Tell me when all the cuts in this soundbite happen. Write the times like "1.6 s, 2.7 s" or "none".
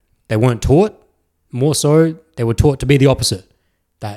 none